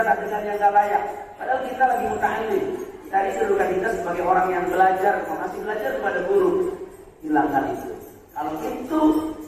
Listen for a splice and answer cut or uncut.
uncut